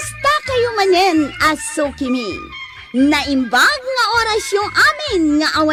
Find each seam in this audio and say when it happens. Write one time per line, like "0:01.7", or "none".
none